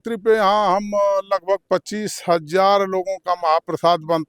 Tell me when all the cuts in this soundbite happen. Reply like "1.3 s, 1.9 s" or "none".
none